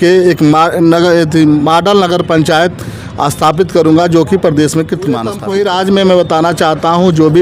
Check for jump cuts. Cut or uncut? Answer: uncut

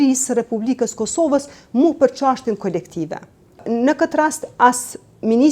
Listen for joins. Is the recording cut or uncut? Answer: cut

